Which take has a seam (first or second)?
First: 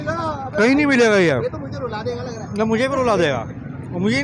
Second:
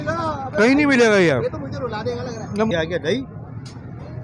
second